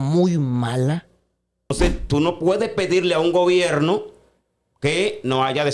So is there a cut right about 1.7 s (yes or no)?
yes